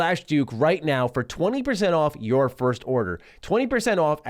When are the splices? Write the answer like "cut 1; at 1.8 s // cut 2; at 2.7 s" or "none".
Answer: none

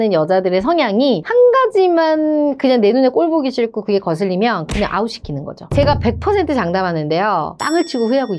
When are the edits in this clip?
cut 1; at 5.6 s // cut 2; at 7.6 s

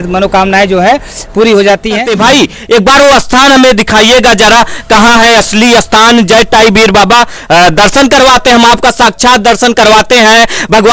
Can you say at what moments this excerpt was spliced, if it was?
cut 1; at 2.1 s

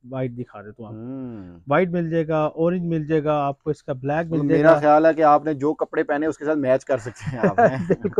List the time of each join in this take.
none

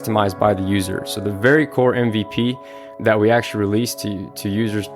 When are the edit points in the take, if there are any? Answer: cut 1; at 2.8 s

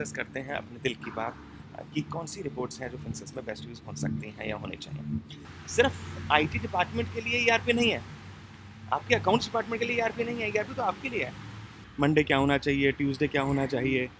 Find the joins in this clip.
cut 1; at 5.5 s // cut 2; at 11.8 s

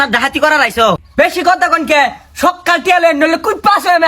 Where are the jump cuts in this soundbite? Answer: cut 1; at 1.0 s

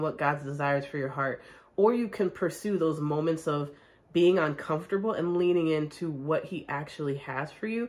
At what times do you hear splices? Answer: none

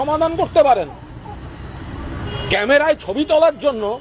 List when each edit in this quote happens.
none

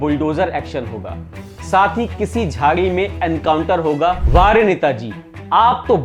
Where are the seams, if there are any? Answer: cut 1; at 4.2 s

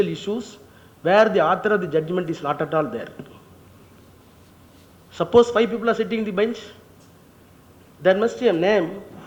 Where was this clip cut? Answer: none

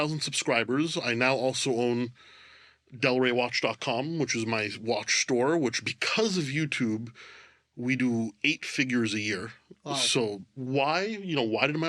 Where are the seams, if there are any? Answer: cut 1; at 10.6 s

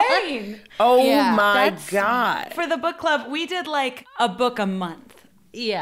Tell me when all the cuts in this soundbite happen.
cut 1; at 2.5 s // cut 2; at 4.0 s

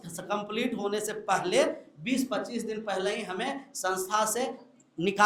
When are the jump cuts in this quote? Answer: none

